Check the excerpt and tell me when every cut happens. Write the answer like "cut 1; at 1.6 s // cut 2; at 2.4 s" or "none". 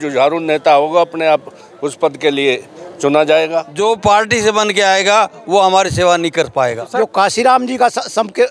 cut 1; at 3.7 s // cut 2; at 6.8 s